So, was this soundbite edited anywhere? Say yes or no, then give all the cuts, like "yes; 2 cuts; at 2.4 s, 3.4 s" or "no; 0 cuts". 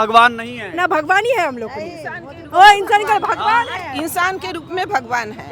no; 0 cuts